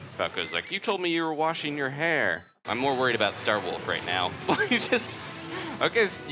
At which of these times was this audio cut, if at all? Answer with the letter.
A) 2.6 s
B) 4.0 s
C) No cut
A